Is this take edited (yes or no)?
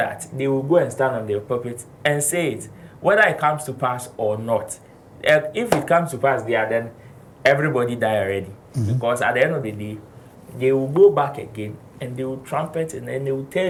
no